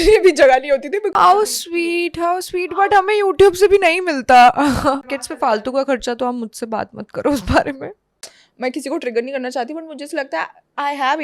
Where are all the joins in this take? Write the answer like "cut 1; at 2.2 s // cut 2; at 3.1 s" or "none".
cut 1; at 1.1 s // cut 2; at 5.1 s // cut 3; at 8.1 s